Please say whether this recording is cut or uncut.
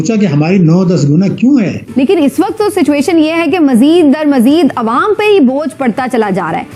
cut